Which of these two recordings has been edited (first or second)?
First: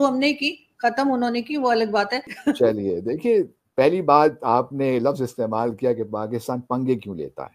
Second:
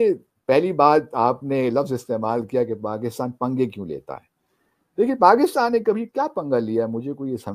first